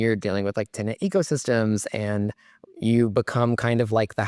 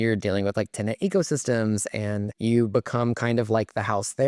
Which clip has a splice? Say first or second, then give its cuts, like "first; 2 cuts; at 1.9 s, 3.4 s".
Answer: second; 1 cut; at 2.3 s